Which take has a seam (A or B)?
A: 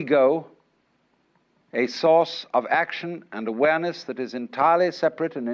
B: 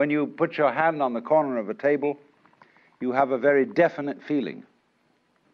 B